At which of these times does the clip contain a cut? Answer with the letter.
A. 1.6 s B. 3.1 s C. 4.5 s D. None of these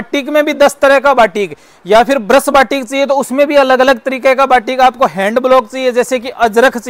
D